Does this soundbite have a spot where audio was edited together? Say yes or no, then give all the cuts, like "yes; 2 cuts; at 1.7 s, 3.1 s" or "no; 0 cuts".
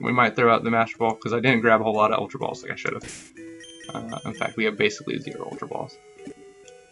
no; 0 cuts